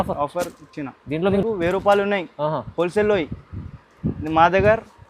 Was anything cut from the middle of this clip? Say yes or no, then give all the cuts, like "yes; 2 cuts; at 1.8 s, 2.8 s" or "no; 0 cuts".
yes; 1 cut; at 1.4 s